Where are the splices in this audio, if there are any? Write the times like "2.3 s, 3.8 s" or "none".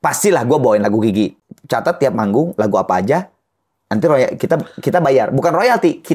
1.4 s